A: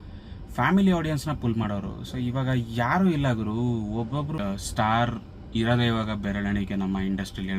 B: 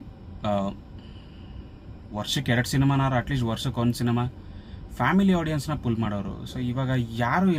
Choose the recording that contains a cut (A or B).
A